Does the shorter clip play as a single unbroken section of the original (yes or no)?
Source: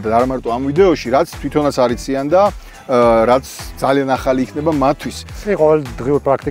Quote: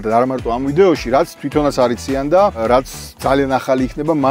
no